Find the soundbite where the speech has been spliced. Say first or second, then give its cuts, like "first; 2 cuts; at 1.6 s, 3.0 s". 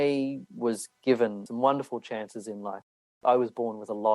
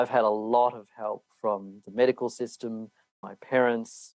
first; 2 cuts; at 1.4 s, 3.2 s